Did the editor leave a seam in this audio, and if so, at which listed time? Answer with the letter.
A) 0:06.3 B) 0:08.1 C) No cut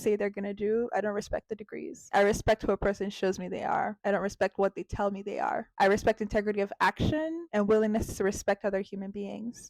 B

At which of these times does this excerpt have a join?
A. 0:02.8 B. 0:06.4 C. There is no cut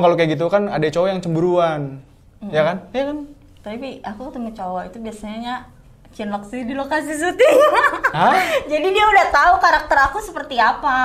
C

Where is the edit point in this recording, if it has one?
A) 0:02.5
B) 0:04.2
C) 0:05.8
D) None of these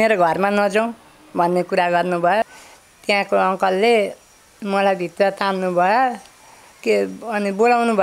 A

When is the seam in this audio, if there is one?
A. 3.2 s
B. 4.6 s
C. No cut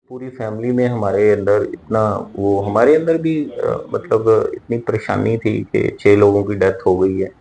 C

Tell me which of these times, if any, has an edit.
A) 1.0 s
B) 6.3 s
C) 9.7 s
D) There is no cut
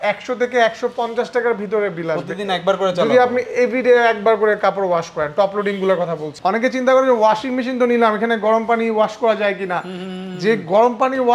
B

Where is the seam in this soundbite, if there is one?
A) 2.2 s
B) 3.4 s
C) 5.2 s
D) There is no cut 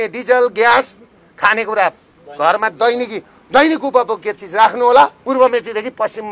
C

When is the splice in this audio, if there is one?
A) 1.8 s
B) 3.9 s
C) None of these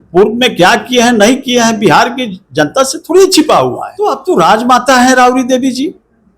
B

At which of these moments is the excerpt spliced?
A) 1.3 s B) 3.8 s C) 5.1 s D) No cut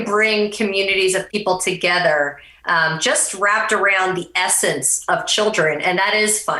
A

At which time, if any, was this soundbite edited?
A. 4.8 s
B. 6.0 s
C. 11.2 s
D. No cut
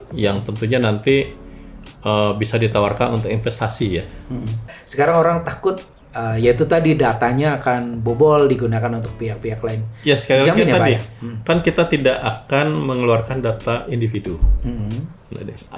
A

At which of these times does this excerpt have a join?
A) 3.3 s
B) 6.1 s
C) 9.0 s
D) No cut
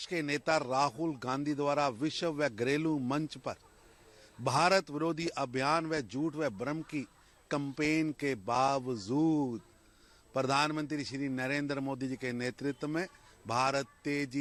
D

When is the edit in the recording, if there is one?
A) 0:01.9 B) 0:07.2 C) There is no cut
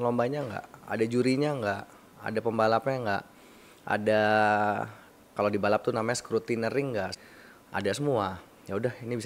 B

